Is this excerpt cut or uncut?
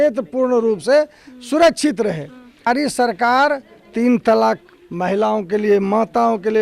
cut